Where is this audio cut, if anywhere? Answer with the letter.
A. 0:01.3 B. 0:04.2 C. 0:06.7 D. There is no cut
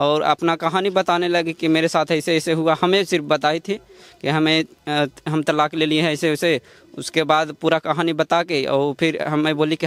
D